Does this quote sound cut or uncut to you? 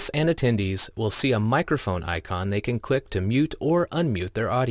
cut